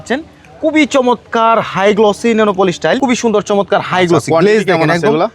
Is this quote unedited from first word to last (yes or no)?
no